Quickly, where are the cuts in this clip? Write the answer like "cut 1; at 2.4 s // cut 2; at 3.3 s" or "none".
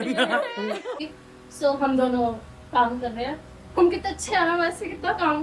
cut 1; at 1.0 s